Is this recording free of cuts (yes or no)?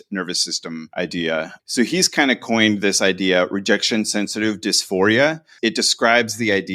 no